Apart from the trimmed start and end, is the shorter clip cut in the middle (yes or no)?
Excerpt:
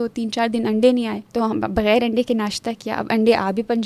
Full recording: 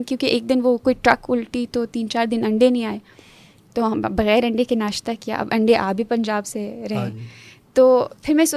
yes